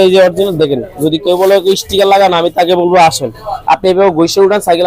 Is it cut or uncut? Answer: uncut